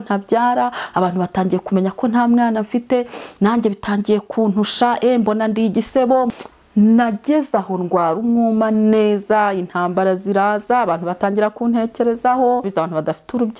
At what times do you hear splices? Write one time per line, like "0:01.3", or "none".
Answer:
0:06.3
0:12.7

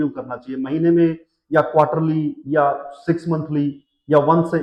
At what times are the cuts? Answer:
none

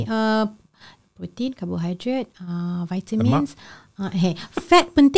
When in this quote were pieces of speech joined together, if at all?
none

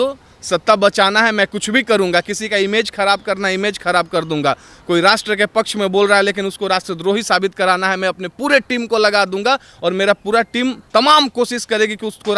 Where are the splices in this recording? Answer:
none

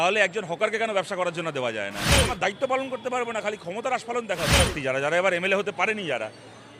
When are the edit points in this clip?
0:02.3
0:04.7

